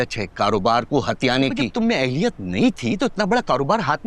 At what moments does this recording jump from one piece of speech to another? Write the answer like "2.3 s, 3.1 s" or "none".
1.7 s